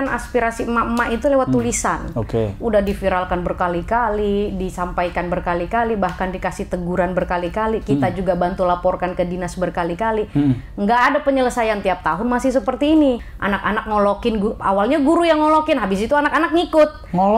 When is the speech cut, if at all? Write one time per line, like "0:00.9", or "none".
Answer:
0:13.3